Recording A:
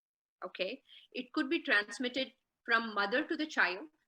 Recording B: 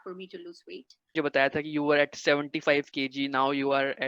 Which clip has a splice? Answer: B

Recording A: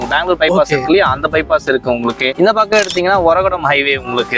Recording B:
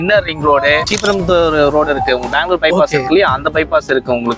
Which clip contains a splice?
B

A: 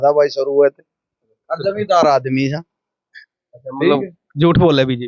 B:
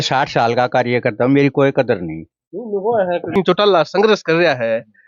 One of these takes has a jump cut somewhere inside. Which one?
B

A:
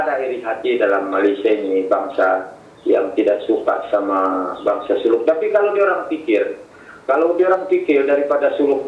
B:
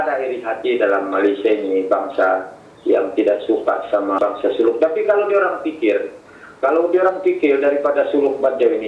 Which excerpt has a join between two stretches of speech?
B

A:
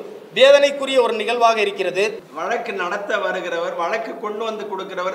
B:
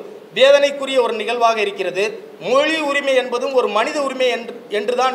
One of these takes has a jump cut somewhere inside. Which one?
A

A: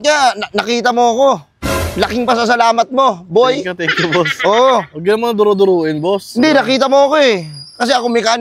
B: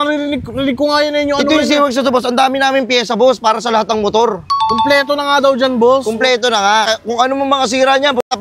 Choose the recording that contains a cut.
B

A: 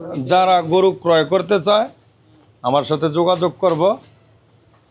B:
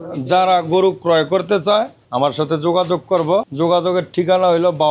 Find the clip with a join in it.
B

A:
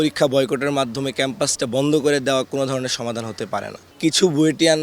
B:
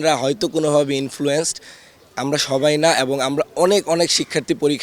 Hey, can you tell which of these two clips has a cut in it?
A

